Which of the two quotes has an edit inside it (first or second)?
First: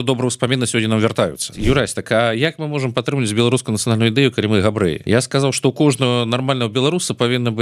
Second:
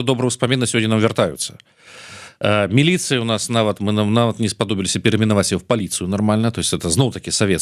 first